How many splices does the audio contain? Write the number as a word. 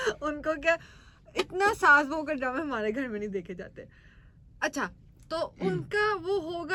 zero